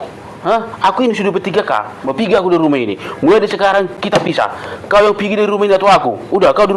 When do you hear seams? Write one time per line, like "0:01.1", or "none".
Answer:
0:02.0